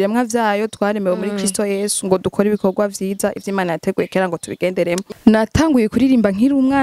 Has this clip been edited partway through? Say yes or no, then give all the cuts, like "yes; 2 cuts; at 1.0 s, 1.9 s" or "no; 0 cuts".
yes; 1 cut; at 5.1 s